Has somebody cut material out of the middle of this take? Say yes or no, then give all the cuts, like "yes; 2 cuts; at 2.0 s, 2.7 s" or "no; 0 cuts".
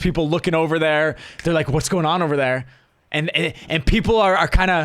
no; 0 cuts